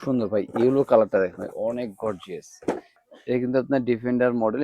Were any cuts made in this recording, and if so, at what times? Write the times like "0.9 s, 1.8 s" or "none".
2.9 s